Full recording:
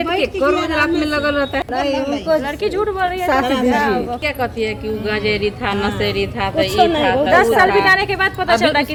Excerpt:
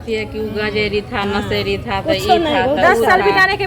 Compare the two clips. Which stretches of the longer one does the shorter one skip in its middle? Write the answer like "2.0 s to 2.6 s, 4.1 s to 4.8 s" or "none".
none